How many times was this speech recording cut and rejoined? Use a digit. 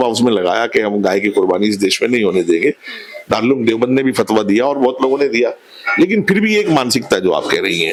0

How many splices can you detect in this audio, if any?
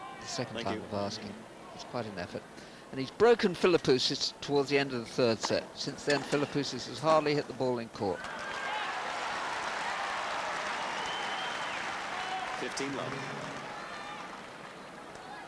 1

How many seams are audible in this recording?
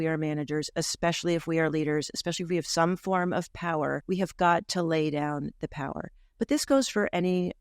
1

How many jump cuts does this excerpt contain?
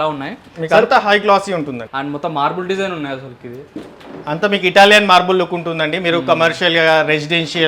1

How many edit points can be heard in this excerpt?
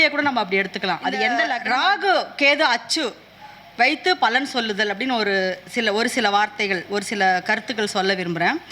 1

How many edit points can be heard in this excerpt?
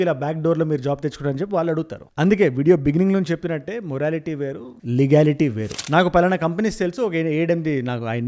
1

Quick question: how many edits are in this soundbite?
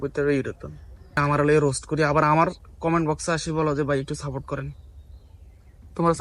1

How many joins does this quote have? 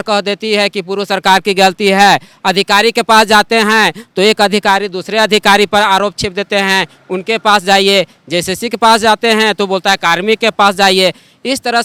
0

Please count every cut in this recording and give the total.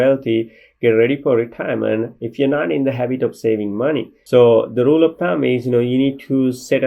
1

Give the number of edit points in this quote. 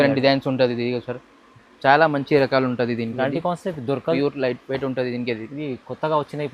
1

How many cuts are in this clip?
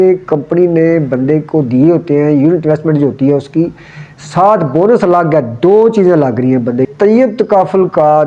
1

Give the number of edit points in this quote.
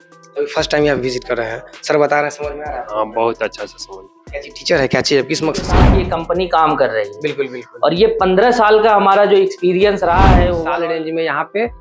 2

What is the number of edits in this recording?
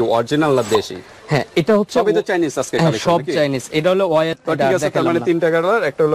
1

